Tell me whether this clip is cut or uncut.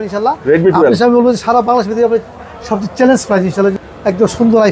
cut